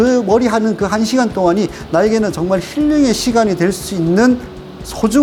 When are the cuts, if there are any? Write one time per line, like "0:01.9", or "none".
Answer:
none